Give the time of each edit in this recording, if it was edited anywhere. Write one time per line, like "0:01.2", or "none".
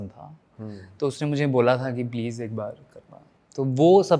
none